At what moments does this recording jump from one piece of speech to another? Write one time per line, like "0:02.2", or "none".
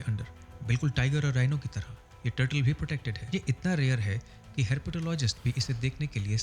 0:03.1